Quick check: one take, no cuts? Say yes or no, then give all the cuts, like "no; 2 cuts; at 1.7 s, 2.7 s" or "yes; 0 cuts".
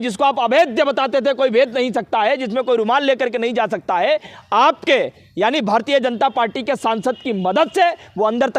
yes; 0 cuts